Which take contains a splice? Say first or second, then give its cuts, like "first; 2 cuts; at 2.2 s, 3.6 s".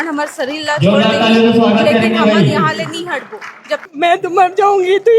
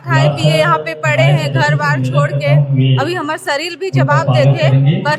first; 1 cut; at 3.8 s